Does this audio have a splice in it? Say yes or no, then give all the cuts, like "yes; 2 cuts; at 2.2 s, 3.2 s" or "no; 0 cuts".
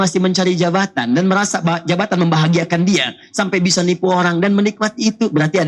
no; 0 cuts